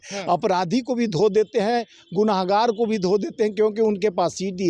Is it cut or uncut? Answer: uncut